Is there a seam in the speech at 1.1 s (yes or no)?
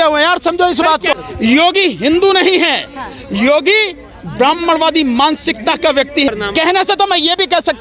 yes